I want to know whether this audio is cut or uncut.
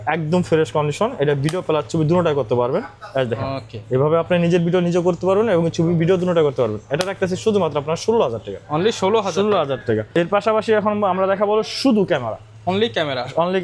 uncut